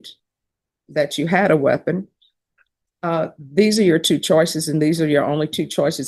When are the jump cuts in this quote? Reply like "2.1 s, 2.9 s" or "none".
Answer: none